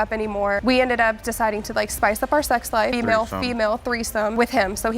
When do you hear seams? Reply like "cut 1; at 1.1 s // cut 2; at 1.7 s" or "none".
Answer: cut 1; at 2.9 s